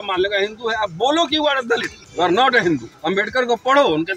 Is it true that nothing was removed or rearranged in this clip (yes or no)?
no